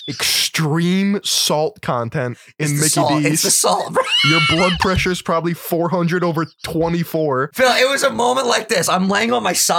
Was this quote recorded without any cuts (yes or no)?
no